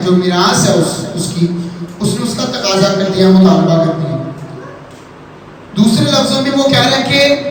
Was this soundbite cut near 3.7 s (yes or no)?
no